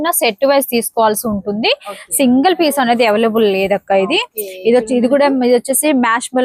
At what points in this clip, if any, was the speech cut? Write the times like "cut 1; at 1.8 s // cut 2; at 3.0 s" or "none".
none